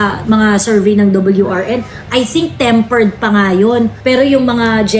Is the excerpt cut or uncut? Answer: cut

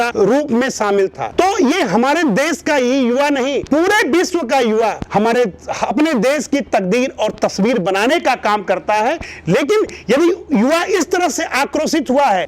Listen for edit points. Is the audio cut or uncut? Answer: uncut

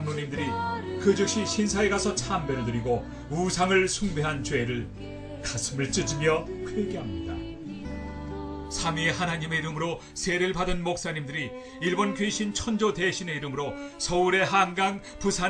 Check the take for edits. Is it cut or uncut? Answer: uncut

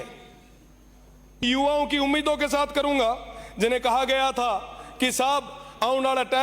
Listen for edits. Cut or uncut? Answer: cut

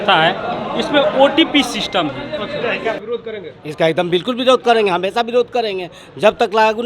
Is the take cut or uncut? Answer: cut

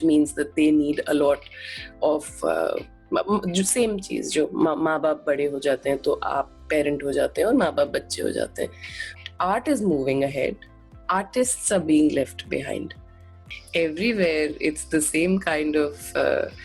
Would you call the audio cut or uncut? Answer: cut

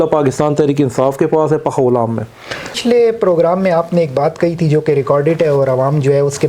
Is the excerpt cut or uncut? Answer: cut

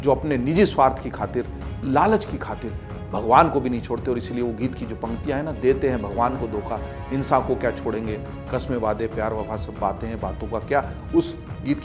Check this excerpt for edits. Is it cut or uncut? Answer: uncut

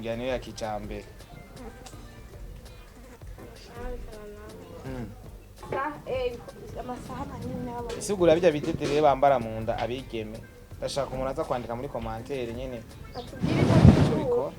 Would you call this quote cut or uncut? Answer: cut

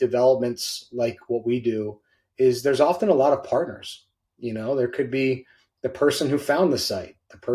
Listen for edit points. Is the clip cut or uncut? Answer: uncut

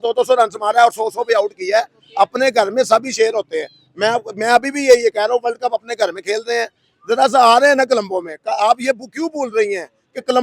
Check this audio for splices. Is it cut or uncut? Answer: uncut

